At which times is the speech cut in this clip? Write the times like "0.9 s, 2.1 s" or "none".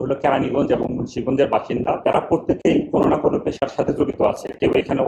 2.0 s